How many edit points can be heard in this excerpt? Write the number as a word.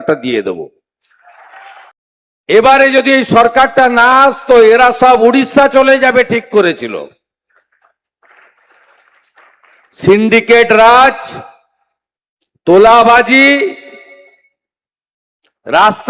one